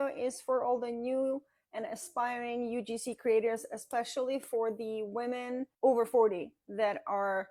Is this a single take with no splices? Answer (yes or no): no